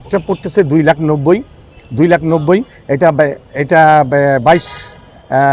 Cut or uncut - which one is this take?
uncut